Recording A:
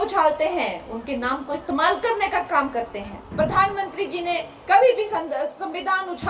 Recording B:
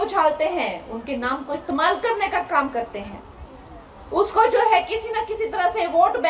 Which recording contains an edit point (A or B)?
A